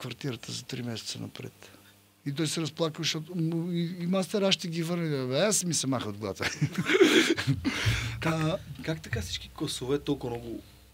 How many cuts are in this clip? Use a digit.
0